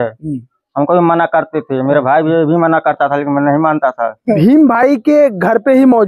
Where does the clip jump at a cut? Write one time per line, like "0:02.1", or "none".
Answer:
0:04.3